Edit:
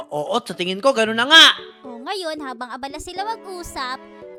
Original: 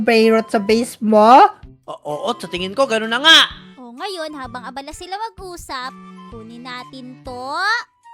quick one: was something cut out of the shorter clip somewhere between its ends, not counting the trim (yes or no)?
no